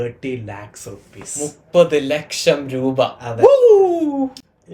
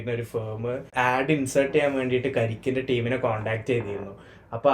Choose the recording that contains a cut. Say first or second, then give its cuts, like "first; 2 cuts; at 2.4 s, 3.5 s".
second; 1 cut; at 0.9 s